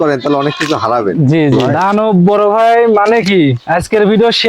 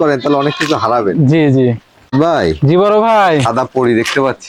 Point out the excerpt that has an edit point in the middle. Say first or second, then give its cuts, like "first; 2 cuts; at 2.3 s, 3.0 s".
first; 1 cut; at 1.7 s